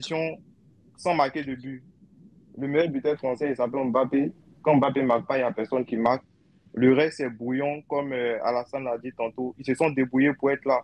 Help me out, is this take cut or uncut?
uncut